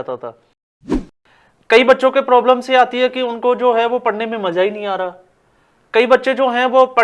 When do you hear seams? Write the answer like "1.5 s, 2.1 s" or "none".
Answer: 0.9 s